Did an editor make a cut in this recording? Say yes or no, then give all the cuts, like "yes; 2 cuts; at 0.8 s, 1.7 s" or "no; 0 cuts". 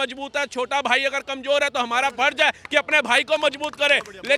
no; 0 cuts